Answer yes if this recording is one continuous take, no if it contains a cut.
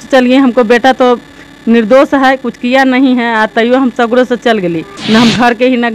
no